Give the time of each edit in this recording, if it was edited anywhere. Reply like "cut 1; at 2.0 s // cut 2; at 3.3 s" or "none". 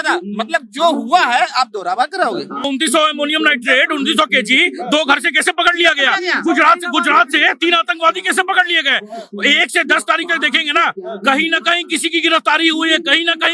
cut 1; at 2.7 s